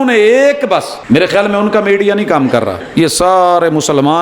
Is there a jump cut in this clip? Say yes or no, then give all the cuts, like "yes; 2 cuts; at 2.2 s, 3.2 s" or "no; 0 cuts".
yes; 2 cuts; at 0.9 s, 2.8 s